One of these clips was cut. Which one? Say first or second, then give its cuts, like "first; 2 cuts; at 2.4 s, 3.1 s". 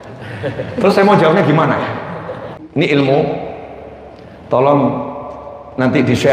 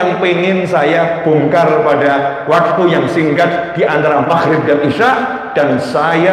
first; 1 cut; at 2.6 s